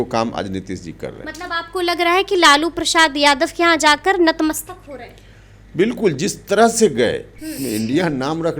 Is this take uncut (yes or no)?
no